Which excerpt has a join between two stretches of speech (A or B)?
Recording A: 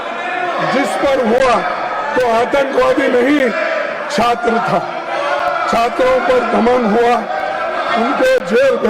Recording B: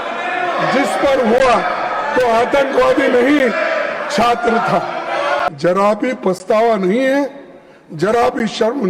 B